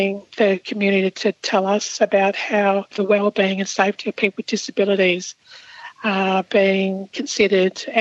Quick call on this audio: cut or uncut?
uncut